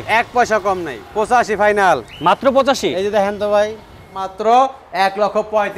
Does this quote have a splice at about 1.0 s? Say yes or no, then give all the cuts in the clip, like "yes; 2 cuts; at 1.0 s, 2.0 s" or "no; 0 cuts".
yes; 2 cuts; at 1.0 s, 4.3 s